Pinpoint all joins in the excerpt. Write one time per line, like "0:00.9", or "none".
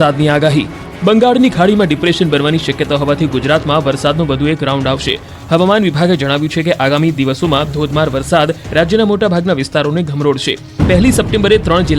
0:05.6